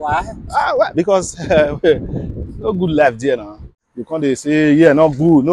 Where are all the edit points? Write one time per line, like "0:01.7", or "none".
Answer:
0:03.8